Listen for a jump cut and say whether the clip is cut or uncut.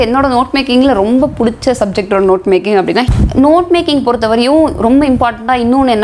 cut